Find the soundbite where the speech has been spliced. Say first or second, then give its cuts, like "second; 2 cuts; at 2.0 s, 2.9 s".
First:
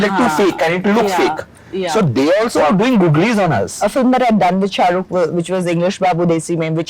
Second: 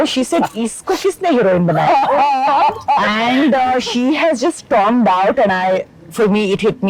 first; 1 cut; at 3.8 s